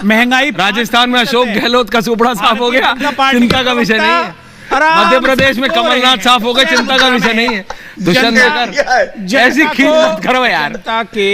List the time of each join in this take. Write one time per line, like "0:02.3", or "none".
none